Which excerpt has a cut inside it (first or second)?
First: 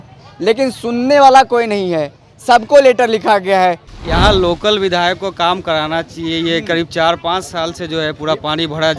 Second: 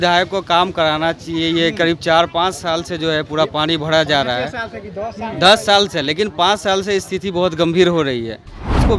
first